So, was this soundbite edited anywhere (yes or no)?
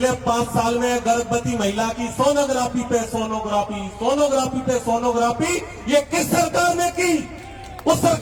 no